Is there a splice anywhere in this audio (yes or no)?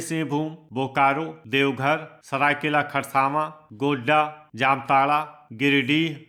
no